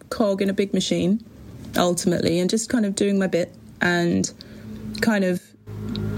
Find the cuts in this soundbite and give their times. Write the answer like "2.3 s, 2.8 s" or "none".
none

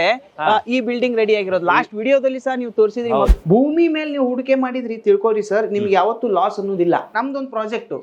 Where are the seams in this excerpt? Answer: 3.3 s, 7.1 s

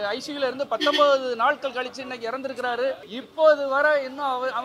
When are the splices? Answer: 3.2 s

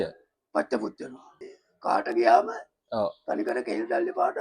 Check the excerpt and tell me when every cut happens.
1.3 s

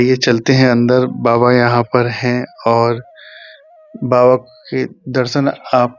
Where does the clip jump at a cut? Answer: none

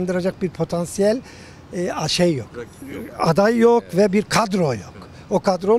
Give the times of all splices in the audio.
none

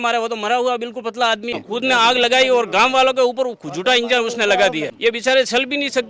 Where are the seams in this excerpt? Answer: 1.6 s, 4.9 s

